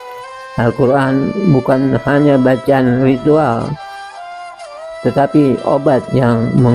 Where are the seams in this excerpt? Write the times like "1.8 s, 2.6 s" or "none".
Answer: none